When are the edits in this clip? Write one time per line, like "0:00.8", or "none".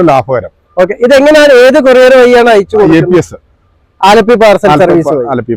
none